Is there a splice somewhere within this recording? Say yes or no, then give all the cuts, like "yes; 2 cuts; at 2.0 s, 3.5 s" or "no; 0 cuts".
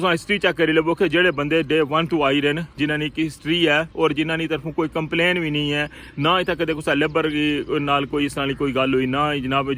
no; 0 cuts